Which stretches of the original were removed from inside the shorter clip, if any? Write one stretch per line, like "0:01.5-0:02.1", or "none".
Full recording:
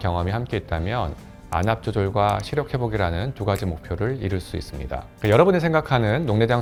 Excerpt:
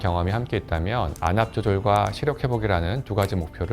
0:01.1-0:01.4